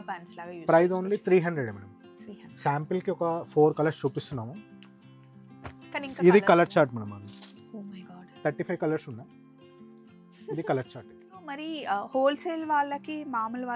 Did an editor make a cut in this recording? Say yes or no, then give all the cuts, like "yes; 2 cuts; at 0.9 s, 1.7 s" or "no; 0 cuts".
yes; 1 cut; at 11.5 s